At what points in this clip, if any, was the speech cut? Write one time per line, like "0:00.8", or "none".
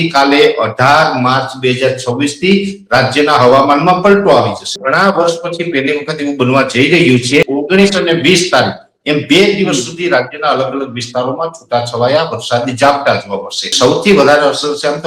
0:04.7
0:07.5
0:13.7